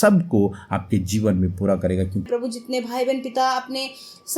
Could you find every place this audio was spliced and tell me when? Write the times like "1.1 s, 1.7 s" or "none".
2.2 s